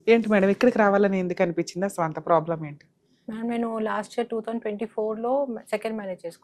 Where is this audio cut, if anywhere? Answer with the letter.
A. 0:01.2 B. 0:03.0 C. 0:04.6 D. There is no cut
D